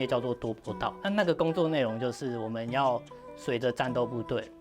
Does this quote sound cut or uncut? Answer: cut